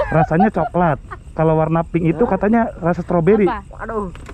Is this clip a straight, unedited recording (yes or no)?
yes